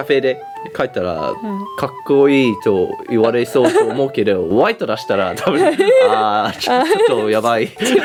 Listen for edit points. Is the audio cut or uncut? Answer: uncut